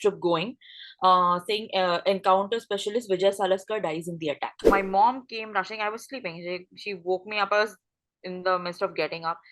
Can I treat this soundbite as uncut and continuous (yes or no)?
no